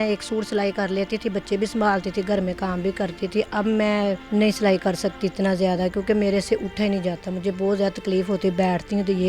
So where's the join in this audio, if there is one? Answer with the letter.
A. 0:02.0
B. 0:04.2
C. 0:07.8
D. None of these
B